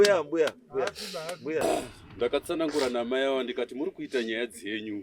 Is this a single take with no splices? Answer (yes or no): no